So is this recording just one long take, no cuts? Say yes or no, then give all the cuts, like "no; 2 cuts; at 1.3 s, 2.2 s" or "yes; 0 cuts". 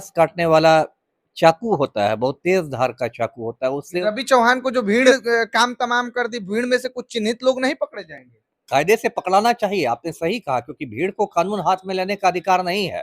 no; 2 cuts; at 4.0 s, 5.2 s